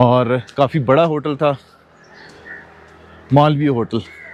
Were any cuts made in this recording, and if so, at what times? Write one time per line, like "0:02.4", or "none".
none